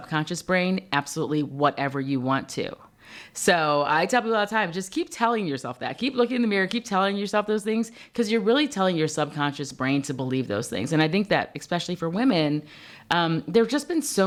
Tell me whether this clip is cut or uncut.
uncut